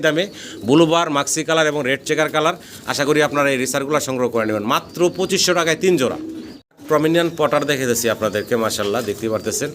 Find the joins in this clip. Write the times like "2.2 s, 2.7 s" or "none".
none